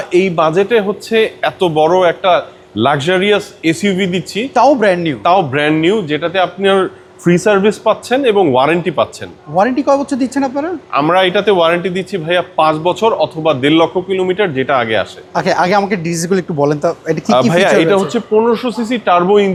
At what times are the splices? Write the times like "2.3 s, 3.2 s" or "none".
none